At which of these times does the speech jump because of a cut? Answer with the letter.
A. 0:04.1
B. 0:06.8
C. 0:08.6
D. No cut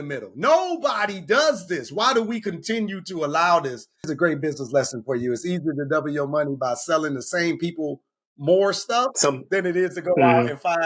A